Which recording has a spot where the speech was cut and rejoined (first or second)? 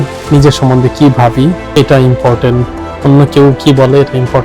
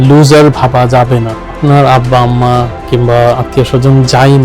second